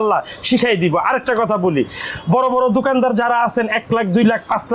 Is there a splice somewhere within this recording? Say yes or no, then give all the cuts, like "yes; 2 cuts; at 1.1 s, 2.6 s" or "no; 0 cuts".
no; 0 cuts